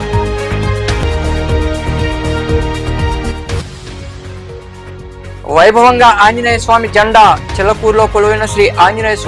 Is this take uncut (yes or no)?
no